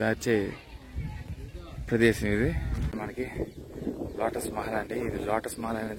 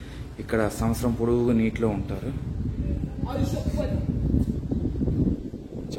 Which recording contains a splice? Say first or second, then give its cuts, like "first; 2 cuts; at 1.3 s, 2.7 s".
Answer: first; 1 cut; at 2.9 s